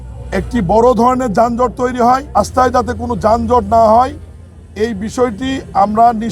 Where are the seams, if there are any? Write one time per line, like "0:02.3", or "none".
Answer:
0:02.4